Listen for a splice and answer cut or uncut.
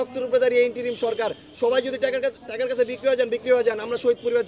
uncut